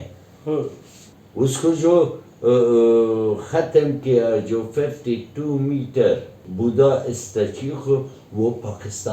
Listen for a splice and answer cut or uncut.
cut